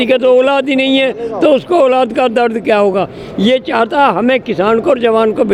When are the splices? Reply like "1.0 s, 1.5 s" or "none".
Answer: none

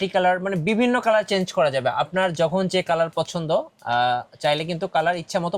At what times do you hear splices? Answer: none

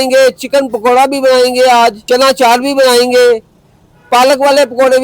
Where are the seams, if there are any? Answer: 2.0 s

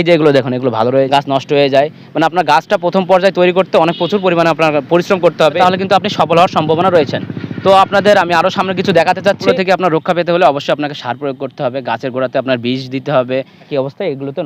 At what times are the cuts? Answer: 1.1 s, 5.6 s, 9.5 s, 13.7 s

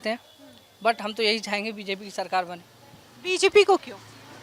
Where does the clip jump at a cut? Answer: none

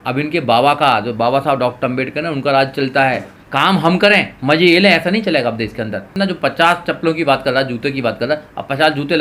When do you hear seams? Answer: 3.3 s, 6.1 s

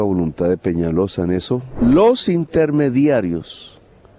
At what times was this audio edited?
1.7 s

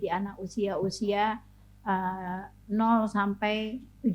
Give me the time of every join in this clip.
none

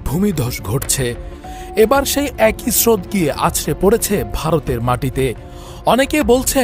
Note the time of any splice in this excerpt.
1.5 s

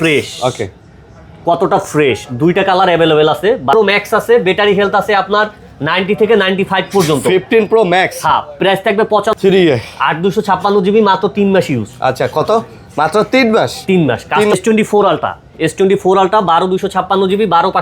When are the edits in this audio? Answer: 3.7 s, 9.3 s, 14.5 s

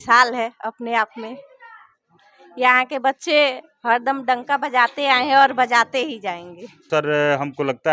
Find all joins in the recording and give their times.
6.9 s

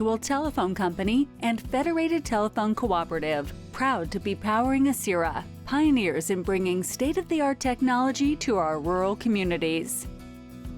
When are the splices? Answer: 9.9 s

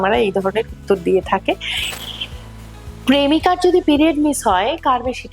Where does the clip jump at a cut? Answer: 1.8 s

